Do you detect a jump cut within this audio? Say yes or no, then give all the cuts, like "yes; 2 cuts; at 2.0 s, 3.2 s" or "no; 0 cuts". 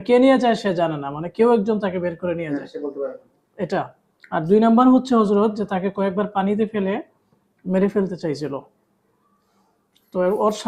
no; 0 cuts